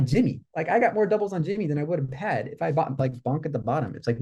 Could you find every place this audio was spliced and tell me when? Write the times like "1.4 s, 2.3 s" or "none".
none